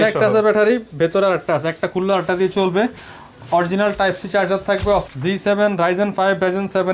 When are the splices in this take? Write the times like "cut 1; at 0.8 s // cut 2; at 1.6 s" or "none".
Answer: cut 1; at 5.0 s